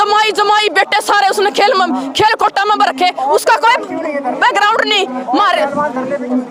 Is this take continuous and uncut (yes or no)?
yes